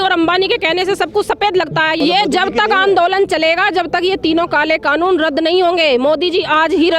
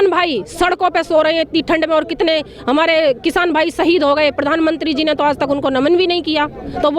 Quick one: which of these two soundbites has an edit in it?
first; 1 cut; at 2.0 s

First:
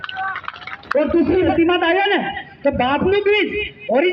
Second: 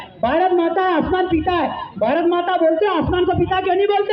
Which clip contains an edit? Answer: first; 1 cut; at 1.5 s

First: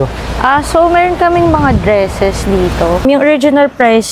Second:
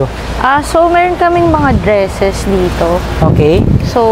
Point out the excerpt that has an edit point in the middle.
first; 1 cut; at 3.0 s

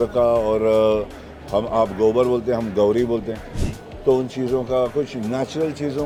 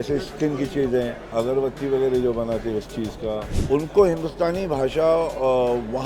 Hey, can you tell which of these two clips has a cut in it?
second; 2 cuts; at 1.2 s, 3.5 s

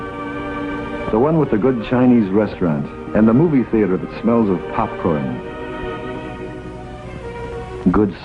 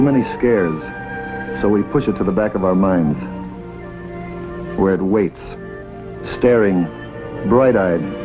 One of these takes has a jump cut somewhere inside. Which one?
second; 1 cut; at 6.9 s

